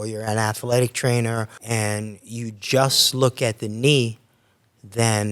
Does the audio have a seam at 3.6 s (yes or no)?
no